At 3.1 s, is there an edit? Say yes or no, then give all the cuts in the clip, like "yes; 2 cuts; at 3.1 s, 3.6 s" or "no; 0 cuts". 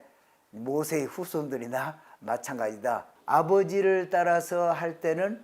yes; 1 cut; at 3.1 s